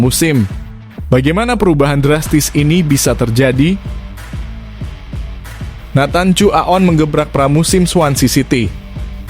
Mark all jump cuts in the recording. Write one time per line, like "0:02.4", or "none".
0:04.0
0:05.9